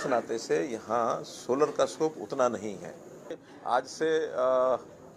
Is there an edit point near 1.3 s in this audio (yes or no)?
no